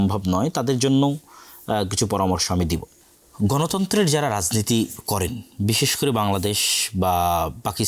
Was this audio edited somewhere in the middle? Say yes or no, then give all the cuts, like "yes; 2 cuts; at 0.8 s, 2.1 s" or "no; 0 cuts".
yes; 1 cut; at 2.9 s